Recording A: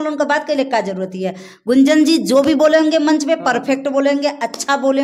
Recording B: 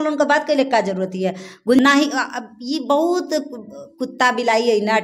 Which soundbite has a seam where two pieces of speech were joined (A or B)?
B